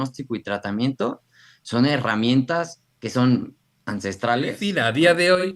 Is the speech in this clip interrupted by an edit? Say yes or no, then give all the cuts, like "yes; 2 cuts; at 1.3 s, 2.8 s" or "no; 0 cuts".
yes; 1 cut; at 4.6 s